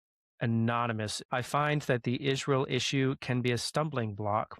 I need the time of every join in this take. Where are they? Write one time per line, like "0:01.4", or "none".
0:01.2